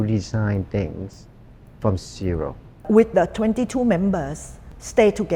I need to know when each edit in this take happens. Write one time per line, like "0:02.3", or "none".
0:02.7